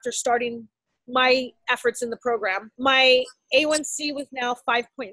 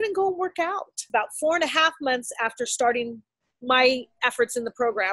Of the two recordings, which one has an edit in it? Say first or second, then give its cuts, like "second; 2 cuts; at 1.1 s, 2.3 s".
second; 1 cut; at 1.0 s